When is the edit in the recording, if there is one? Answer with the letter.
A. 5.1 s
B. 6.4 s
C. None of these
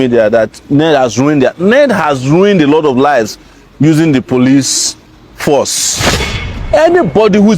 B